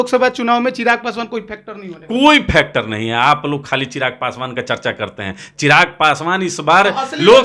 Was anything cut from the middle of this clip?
no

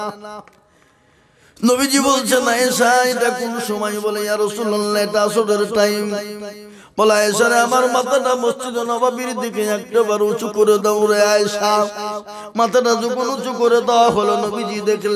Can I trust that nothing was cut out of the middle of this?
yes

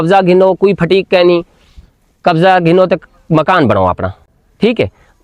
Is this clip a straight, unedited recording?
yes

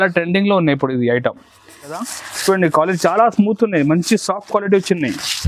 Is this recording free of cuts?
no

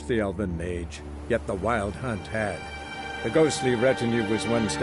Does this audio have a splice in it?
no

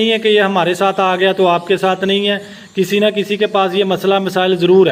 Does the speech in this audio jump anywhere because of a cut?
no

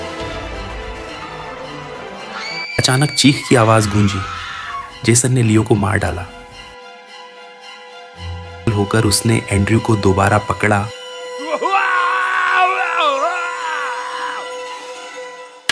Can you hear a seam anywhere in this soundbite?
yes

